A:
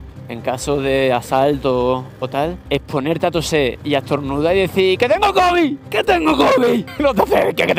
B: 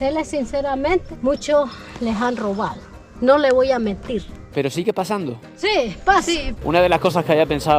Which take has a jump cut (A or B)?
B